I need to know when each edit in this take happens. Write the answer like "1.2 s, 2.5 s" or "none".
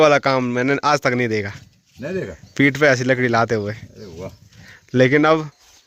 none